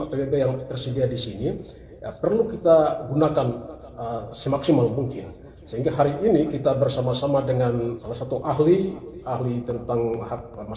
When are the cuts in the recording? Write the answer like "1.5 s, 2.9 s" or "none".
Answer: 8.0 s